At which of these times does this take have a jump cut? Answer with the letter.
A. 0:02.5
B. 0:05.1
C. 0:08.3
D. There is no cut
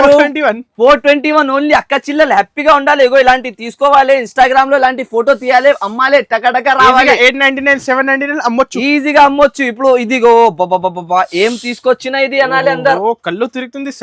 D